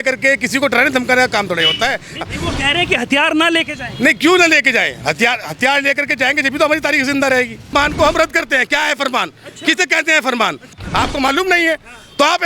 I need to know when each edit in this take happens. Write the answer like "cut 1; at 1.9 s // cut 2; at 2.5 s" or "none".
cut 1; at 2.2 s // cut 2; at 7.7 s // cut 3; at 10.8 s